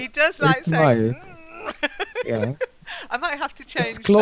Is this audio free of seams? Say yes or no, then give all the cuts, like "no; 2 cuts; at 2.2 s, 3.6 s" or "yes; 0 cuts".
no; 1 cut; at 2.1 s